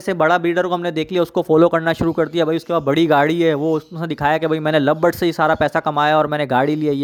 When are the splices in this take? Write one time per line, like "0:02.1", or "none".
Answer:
none